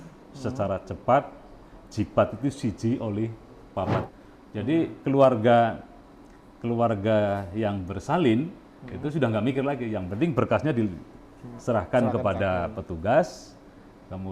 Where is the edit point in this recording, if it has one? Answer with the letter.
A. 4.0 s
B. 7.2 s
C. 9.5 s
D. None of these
A